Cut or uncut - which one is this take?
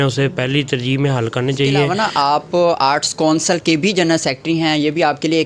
uncut